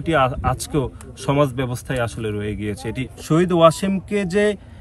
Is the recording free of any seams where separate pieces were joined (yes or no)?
no